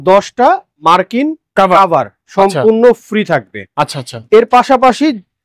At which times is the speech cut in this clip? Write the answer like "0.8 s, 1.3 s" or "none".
none